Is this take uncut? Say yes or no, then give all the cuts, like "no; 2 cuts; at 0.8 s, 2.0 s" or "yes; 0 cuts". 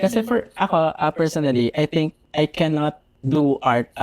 no; 2 cuts; at 2.2 s, 3.1 s